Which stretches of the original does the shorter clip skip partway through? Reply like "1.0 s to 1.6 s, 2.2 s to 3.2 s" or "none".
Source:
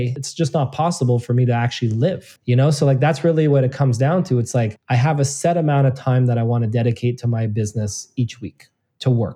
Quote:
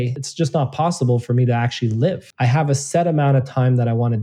2.3 s to 4.8 s